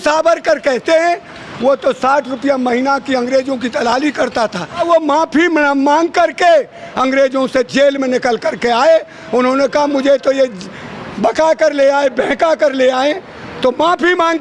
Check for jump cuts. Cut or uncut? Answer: cut